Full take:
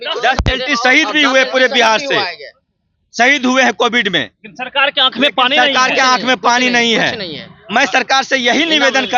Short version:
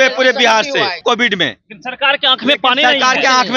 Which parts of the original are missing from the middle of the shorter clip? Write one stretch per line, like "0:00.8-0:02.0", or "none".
0:02.4-0:03.7